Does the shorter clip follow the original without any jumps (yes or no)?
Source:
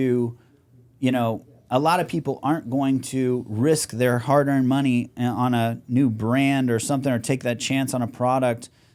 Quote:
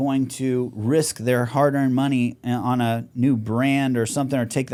yes